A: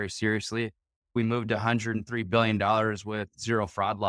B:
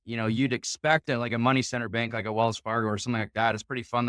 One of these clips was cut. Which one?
A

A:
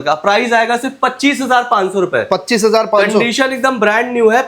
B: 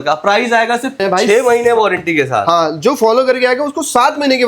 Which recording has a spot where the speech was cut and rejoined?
B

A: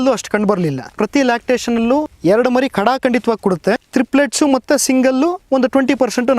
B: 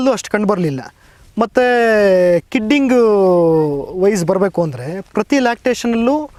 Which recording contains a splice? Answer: A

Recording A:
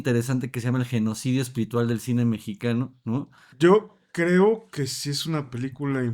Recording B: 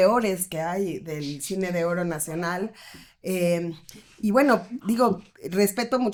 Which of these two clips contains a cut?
A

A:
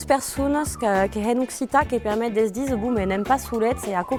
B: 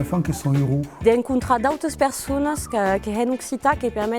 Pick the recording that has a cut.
B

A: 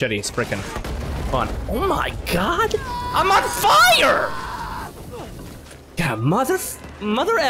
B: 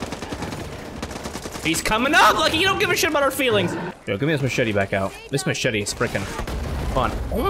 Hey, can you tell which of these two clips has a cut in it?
B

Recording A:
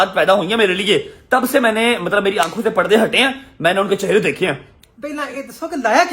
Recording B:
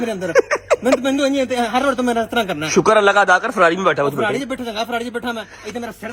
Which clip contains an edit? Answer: A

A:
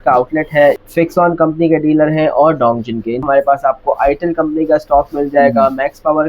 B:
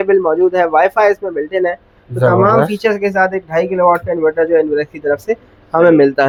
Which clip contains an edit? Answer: A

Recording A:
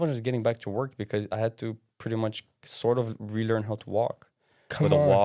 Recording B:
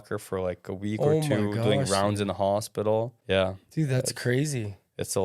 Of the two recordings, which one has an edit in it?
B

